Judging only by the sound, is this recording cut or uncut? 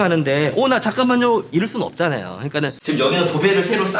cut